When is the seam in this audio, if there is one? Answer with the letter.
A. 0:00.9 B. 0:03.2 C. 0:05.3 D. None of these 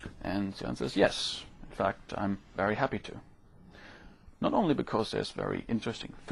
C